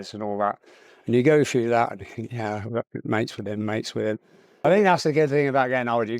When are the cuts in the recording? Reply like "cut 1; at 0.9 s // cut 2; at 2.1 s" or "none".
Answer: cut 1; at 4.5 s